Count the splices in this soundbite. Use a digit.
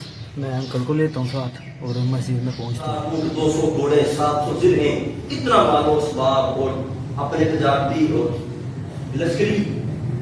1